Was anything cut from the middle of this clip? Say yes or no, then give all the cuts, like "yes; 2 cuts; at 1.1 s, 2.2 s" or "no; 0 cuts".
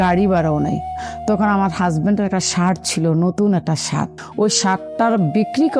yes; 1 cut; at 4.2 s